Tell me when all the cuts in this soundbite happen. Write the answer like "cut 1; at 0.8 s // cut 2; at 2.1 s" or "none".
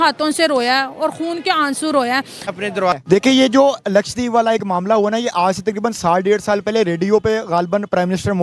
cut 1; at 3.0 s